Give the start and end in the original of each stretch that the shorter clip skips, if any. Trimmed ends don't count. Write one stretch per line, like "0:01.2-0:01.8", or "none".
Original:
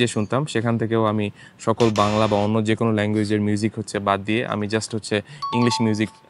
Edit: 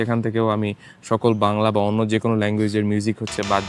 none